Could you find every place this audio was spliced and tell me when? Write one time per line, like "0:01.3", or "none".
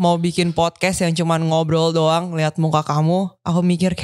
none